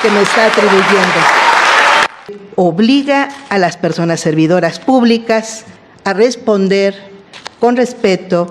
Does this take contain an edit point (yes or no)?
yes